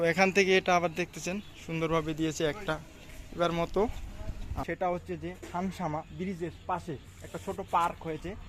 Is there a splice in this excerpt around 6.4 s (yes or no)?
no